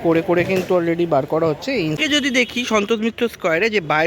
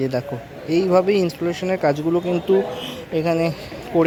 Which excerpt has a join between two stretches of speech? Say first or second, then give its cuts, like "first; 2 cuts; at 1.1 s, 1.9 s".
first; 1 cut; at 2.0 s